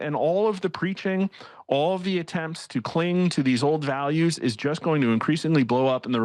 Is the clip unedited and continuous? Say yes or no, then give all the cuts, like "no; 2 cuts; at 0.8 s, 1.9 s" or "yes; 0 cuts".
yes; 0 cuts